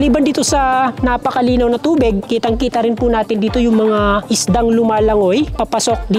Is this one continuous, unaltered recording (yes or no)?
yes